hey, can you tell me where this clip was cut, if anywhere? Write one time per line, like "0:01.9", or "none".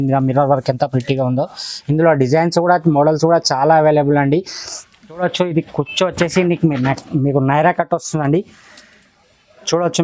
0:05.2